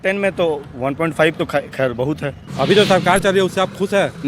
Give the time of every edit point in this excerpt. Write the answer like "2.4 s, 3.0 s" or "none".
2.4 s